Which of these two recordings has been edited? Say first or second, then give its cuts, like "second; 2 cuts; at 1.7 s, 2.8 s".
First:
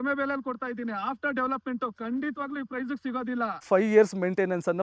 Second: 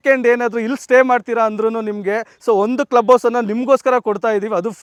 first; 1 cut; at 3.6 s